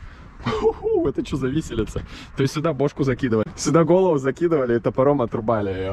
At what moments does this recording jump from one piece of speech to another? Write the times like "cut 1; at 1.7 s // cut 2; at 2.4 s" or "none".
cut 1; at 3.5 s